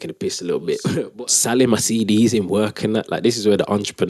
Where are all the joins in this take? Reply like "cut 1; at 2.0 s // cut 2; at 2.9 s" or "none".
cut 1; at 1.1 s